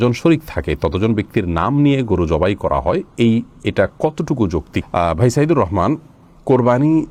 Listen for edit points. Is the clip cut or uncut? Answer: uncut